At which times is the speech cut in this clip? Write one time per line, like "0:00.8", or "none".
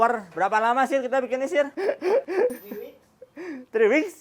none